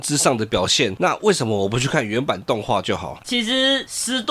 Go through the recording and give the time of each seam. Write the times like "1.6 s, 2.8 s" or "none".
3.2 s